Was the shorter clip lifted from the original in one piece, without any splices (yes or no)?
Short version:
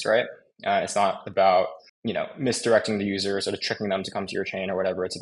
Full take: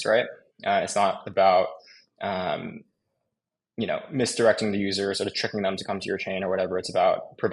no